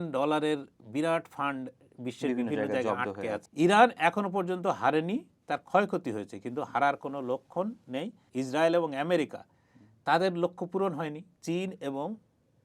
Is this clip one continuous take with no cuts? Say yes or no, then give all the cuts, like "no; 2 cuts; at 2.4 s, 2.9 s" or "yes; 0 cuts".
no; 3 cuts; at 3.5 s, 8.2 s, 11.3 s